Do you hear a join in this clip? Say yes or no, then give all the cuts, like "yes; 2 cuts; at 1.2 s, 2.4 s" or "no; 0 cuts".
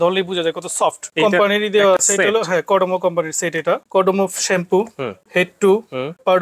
yes; 2 cuts; at 1.0 s, 3.8 s